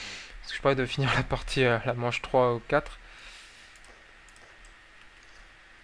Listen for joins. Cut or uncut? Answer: cut